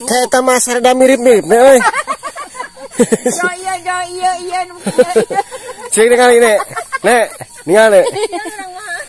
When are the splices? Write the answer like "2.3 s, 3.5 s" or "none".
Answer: none

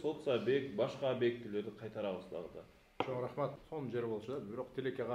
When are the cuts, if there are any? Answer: 3.5 s

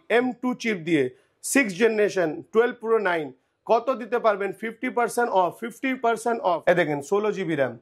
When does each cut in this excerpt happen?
6.6 s

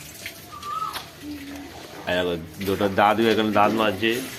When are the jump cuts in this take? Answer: none

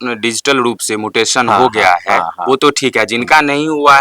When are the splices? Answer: none

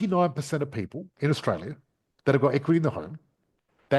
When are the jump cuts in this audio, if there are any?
1.0 s

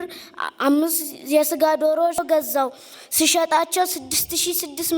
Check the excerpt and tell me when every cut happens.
2.2 s

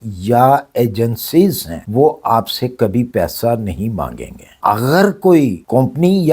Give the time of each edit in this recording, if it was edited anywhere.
4.6 s

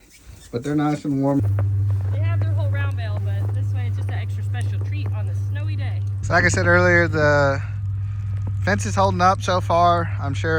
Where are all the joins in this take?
1.4 s, 6.2 s

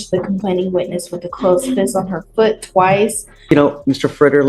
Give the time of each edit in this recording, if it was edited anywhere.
3.5 s

